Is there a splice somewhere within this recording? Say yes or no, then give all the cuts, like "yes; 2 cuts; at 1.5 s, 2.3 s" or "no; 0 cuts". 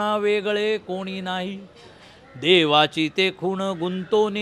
no; 0 cuts